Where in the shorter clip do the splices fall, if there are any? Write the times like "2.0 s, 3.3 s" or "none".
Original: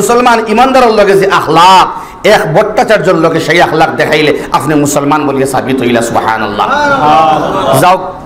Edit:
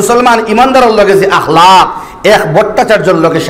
none